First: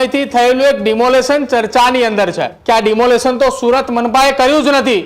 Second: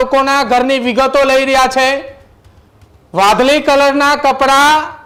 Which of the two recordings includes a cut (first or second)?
first